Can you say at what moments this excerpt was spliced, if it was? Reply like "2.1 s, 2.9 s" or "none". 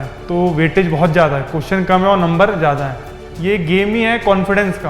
2.9 s